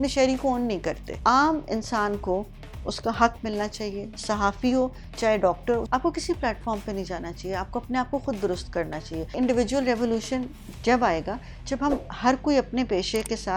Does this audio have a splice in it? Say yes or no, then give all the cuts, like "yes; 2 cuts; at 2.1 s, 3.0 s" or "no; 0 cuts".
yes; 3 cuts; at 1.1 s, 5.8 s, 9.3 s